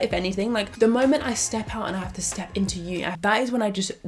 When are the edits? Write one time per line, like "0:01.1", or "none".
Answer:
0:03.1